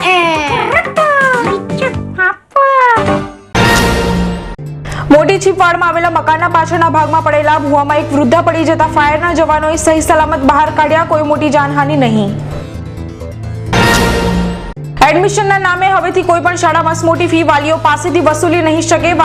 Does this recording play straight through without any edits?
no; 1 cut; at 3.4 s

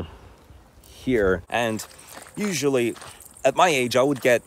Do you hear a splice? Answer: yes; 1 cut; at 1.4 s

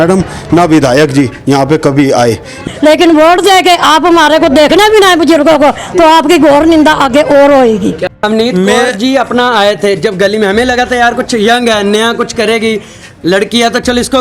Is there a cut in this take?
yes; 2 cuts; at 2.6 s, 8.2 s

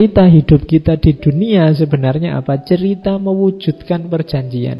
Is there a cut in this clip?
no; 0 cuts

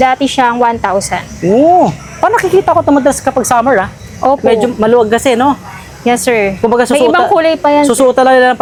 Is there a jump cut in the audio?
no; 0 cuts

